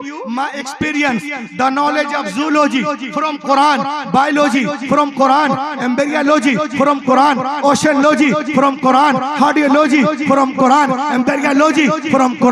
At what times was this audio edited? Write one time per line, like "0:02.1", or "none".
none